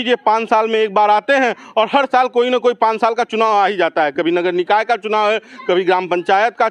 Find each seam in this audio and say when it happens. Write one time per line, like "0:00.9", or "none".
none

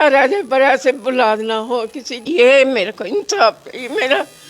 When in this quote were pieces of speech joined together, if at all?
0:02.2

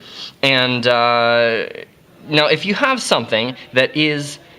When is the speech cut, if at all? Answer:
0:03.5

